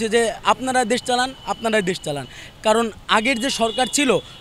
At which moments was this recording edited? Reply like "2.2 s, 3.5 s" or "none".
none